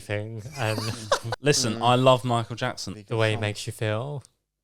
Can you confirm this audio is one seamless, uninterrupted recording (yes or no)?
no